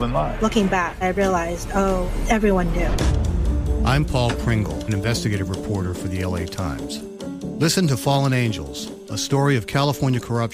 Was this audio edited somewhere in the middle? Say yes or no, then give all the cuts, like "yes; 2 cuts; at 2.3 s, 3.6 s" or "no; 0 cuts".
no; 0 cuts